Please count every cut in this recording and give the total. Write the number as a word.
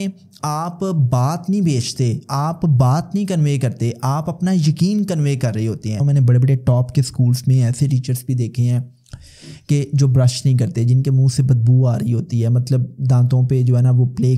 one